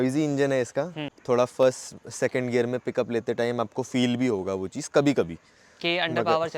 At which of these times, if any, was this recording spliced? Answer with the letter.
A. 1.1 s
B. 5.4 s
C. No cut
A